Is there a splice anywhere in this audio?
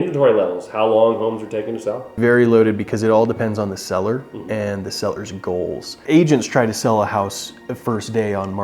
yes; 2 cuts; at 2.1 s, 5.9 s

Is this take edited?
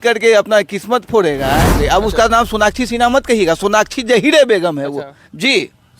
yes; 1 cut; at 1.8 s

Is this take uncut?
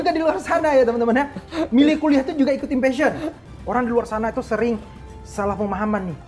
no; 1 cut; at 3.4 s

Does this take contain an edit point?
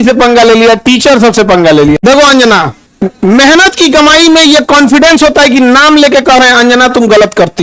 yes; 2 cuts; at 2.0 s, 2.8 s

